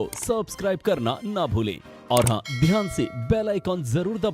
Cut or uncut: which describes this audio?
uncut